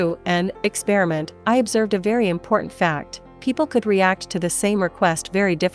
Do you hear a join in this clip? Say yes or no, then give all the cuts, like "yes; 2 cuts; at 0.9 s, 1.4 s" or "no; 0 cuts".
no; 0 cuts